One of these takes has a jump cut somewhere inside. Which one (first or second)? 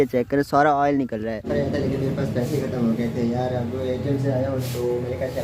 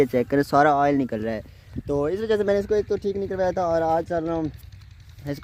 first